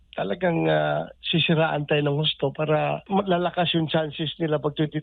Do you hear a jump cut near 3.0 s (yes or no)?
yes